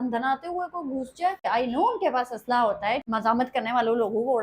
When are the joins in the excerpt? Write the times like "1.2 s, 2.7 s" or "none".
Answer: 1.5 s, 3.0 s

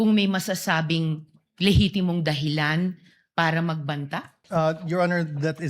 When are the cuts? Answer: 4.4 s

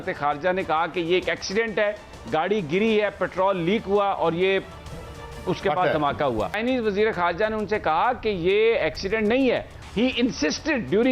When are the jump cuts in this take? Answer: 6.6 s, 9.8 s

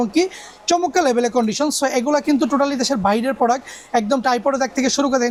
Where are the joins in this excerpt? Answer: none

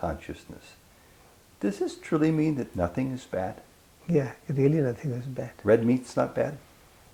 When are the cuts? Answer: none

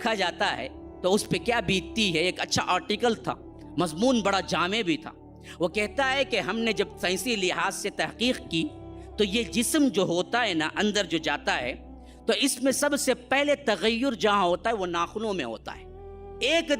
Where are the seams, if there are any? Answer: none

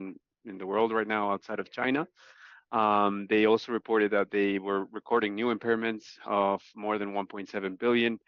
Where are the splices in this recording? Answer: none

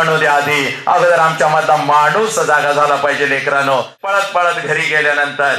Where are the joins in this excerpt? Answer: 3.9 s

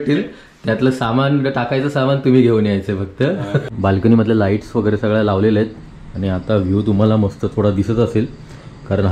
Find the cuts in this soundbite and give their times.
3.6 s

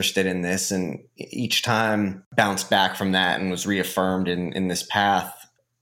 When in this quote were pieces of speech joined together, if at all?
2.2 s

